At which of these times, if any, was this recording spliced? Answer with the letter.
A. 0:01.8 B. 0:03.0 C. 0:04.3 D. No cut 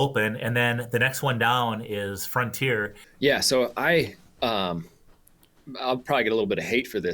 B